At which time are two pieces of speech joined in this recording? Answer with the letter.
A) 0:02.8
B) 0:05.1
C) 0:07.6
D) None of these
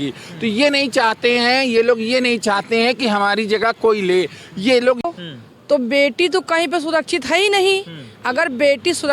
B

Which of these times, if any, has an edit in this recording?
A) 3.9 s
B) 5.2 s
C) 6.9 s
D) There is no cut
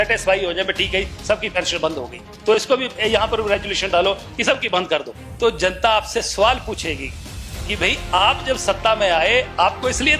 B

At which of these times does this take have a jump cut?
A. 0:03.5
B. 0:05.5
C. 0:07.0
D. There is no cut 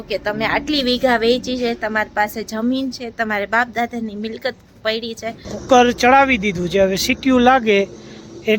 B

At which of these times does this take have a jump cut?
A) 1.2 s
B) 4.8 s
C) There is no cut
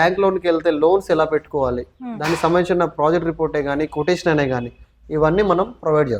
C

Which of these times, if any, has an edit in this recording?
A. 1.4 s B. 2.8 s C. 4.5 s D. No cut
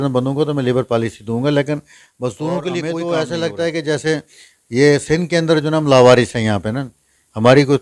B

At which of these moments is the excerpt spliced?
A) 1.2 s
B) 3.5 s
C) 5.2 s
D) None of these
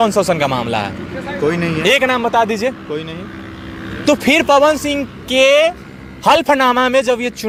D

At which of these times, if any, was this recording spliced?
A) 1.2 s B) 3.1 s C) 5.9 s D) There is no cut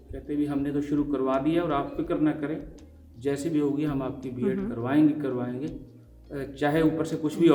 D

